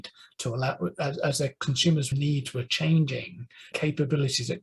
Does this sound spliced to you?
yes; 1 cut; at 3.7 s

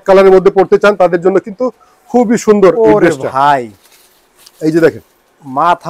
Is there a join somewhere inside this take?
no; 0 cuts

